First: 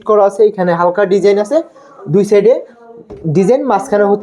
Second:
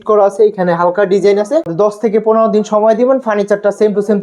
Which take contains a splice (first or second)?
second